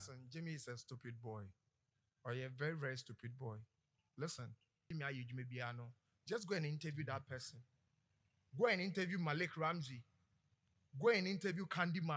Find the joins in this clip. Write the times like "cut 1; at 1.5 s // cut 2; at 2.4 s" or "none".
cut 1; at 4.9 s

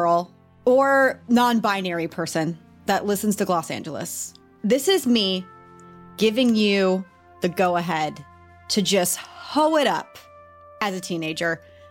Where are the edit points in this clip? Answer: cut 1; at 2.7 s

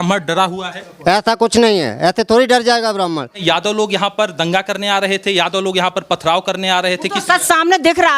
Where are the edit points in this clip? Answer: cut 1; at 3.4 s

